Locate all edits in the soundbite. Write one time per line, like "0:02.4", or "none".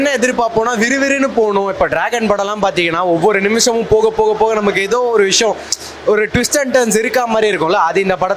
none